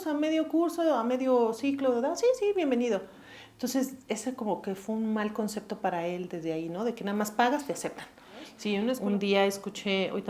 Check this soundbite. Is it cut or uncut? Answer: cut